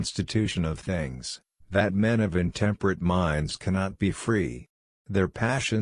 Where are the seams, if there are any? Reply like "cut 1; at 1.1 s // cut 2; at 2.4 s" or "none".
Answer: none